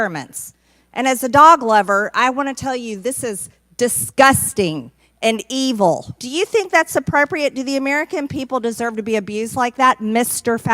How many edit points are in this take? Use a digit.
1